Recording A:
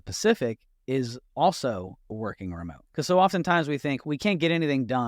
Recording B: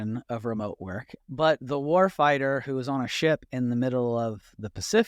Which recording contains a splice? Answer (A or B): A